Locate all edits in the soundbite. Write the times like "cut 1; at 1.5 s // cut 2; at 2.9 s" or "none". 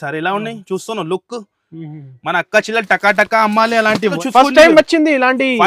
cut 1; at 4.2 s